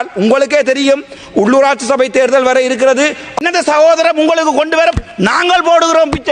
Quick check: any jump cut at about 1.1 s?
no; 1 cut; at 3.4 s

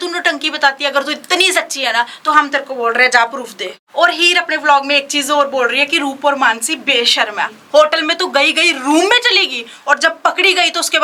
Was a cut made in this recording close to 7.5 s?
yes; 2 cuts; at 3.7 s, 7.5 s

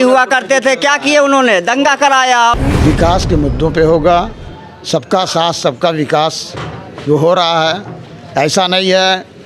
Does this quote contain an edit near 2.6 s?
yes; 1 cut; at 2.6 s

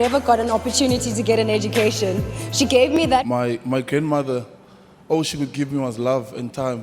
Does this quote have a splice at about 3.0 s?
yes; 1 cut; at 3.0 s

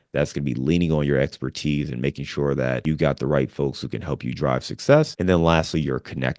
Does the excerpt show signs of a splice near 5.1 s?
yes; 2 cuts; at 2.8 s, 5.1 s

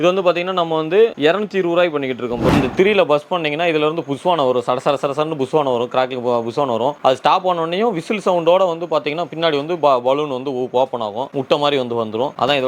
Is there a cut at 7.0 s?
no; 1 cut; at 2.5 s

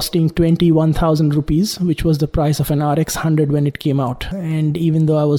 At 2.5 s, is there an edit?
no; 1 cut; at 4.2 s

